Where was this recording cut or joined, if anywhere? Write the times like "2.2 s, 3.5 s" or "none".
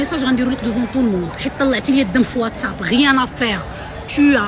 none